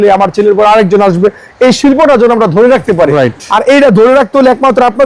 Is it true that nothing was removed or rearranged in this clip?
yes; 0 cuts

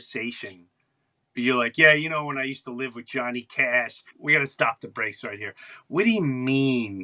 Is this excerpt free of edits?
no; 1 cut; at 4.1 s

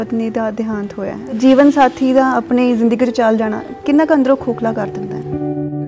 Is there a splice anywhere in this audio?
yes; 2 cuts; at 1.4 s, 4.9 s

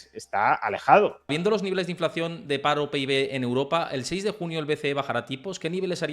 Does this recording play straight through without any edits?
no; 1 cut; at 1.3 s

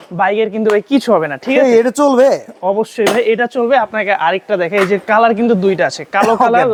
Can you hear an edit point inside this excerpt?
no; 0 cuts

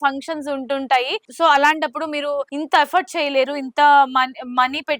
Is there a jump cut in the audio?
no; 0 cuts

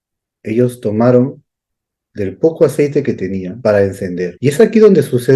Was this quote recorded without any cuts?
no; 2 cuts; at 3.5 s, 4.3 s

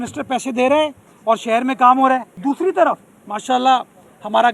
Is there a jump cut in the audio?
yes; 1 cut; at 2.3 s

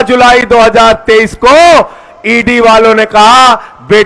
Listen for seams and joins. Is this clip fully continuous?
yes; 0 cuts

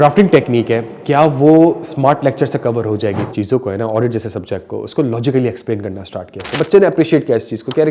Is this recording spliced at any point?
yes; 2 cuts; at 3.3 s, 6.5 s

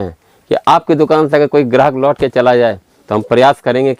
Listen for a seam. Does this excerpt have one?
no; 0 cuts

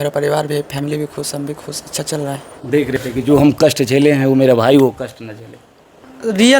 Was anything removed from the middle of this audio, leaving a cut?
yes; 1 cut; at 3.0 s

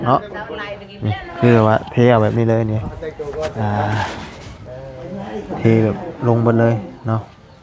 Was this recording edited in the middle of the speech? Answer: no; 0 cuts

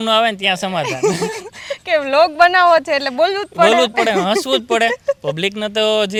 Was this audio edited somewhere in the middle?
no; 0 cuts

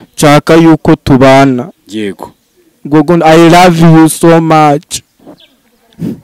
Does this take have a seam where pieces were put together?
no; 0 cuts

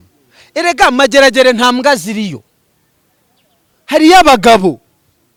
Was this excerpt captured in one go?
yes; 0 cuts

